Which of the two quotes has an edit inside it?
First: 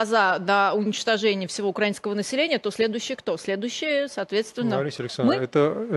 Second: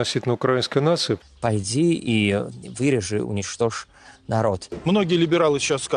second; 2 cuts; at 1.2 s, 4.8 s

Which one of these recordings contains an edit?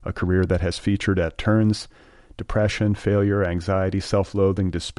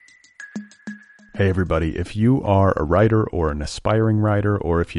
second; 1 cut; at 0.9 s

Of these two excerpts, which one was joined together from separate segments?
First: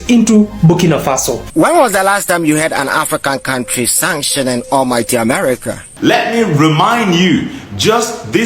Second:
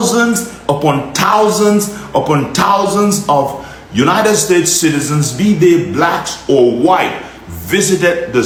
first; 2 cuts; at 1.4 s, 5.9 s

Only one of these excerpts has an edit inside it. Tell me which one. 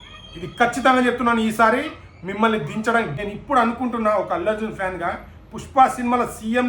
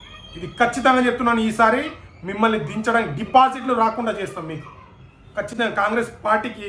first; 1 cut; at 3.2 s

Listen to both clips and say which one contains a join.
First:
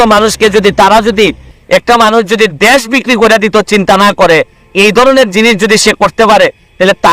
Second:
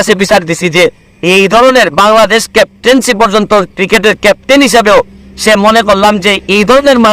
first; 1 cut; at 1.5 s

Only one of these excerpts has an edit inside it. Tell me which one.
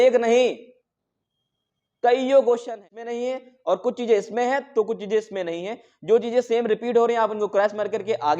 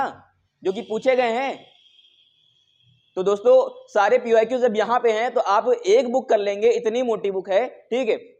first; 1 cut; at 3.0 s

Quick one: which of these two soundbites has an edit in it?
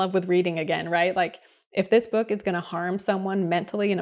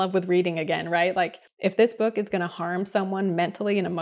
second; 1 cut; at 1.4 s

